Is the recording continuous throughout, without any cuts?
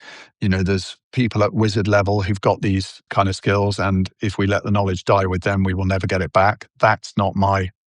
no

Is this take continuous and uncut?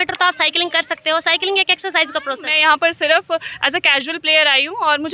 no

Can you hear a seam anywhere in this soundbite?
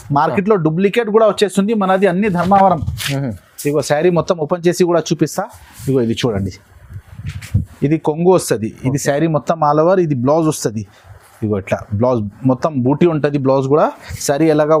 no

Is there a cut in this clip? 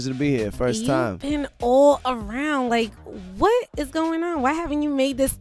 yes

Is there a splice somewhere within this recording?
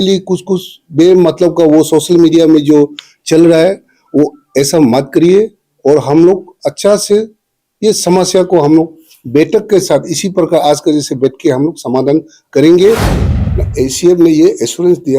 yes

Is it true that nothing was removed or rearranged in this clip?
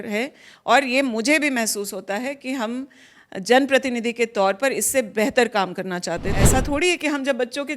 no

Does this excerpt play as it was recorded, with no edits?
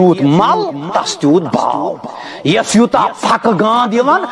yes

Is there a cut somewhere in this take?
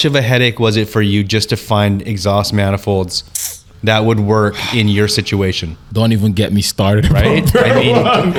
no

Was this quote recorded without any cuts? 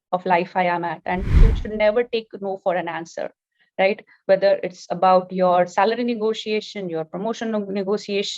no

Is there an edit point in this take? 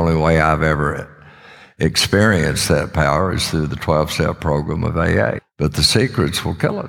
yes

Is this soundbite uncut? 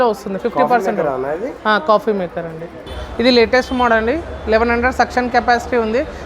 no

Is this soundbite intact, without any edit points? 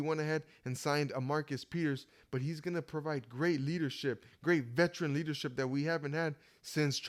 yes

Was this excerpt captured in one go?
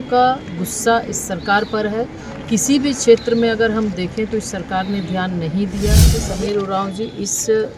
no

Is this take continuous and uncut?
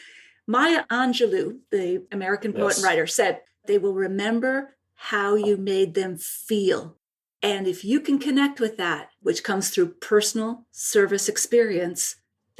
no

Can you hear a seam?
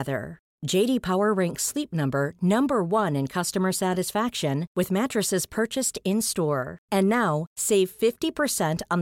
no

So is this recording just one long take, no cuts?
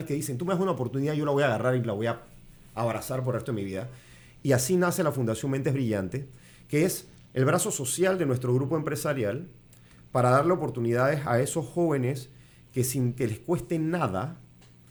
yes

